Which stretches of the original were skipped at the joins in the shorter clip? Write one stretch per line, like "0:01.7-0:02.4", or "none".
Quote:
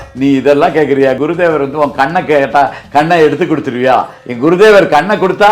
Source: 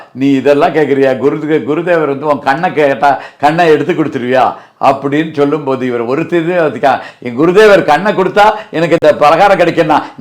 0:01.2-0:01.7
0:04.7-0:07.1

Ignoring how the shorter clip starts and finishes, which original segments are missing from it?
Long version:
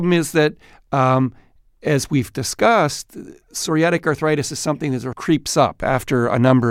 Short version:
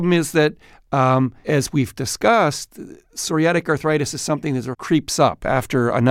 0:01.4-0:01.8

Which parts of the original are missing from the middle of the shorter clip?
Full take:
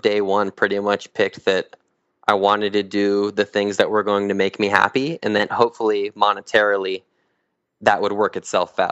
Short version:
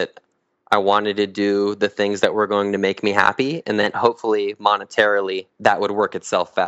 0:07.0-0:07.7

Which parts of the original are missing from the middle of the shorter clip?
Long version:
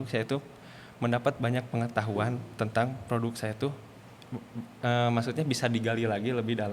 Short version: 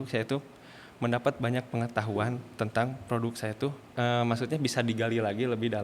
0:03.8-0:04.7

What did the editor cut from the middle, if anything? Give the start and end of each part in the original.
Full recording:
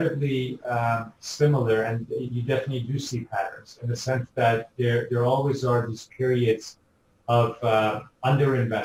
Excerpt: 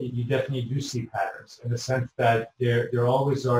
none

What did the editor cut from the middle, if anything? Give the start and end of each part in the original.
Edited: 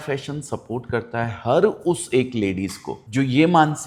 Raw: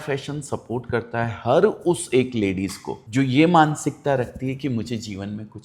none

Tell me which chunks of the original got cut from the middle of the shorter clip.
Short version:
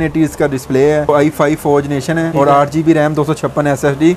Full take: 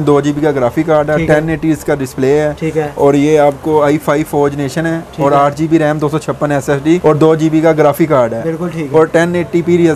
0:02.6-0:03.8
0:05.0-0:05.1

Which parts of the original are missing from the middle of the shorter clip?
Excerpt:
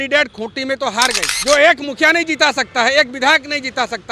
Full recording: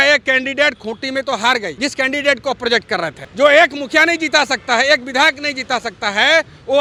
0:01.7-0:03.2

